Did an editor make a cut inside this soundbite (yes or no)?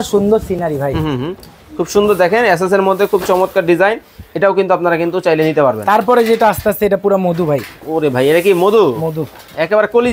no